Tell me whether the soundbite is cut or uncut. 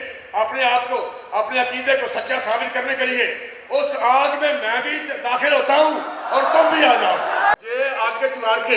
cut